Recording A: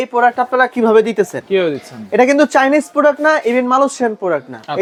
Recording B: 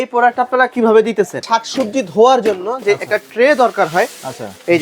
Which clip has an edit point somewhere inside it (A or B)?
B